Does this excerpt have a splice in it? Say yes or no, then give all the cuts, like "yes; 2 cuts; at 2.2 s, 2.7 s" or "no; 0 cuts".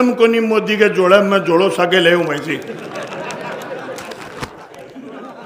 no; 0 cuts